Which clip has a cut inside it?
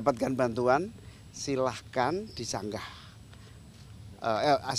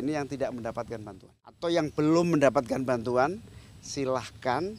second; 1 cut; at 1.6 s

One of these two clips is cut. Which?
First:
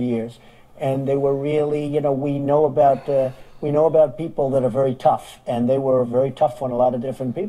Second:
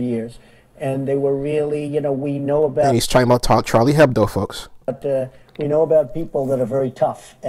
first; 1 cut; at 2.9 s

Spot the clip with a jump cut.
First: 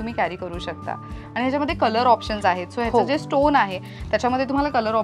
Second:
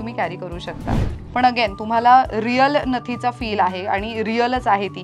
second; 1 cut; at 1.1 s

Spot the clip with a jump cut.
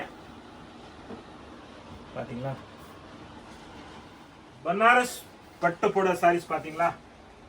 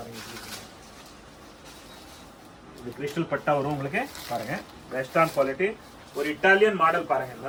first; 1 cut; at 4.4 s

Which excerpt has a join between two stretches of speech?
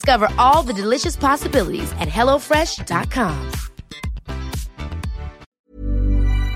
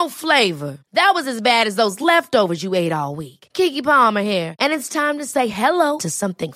first; 1 cut; at 5.4 s

